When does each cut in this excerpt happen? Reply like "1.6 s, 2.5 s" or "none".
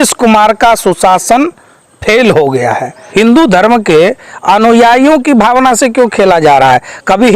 3.0 s

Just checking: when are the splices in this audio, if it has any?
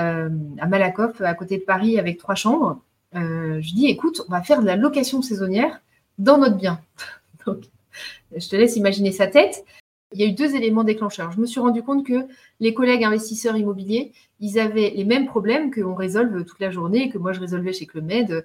10.1 s

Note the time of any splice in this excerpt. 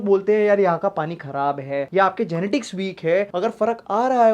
none

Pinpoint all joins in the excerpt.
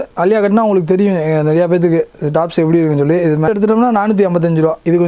3.5 s

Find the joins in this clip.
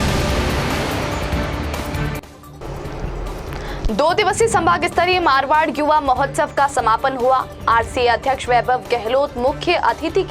2.4 s

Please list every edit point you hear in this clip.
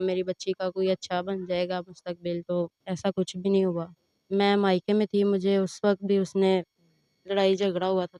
4.1 s

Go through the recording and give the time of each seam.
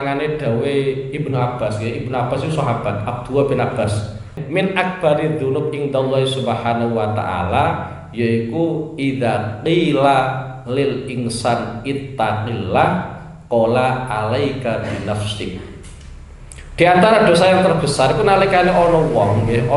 4.3 s

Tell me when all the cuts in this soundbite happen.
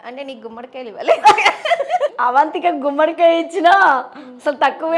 2.1 s

